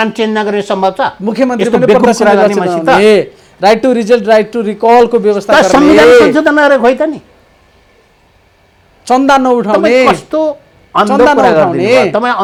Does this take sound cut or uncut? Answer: uncut